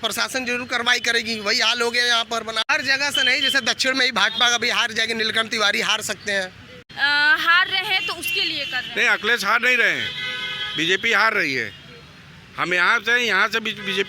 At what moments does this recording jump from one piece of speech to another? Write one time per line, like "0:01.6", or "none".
0:02.7
0:06.8

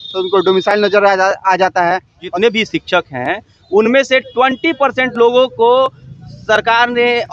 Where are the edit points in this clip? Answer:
0:02.3

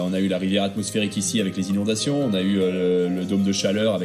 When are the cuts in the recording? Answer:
none

